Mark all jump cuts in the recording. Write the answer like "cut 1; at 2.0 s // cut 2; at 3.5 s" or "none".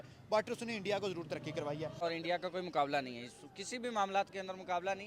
cut 1; at 2.0 s